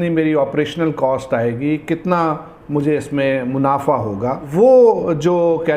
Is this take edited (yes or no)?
yes